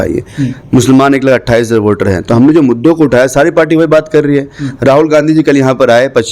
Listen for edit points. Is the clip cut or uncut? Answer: uncut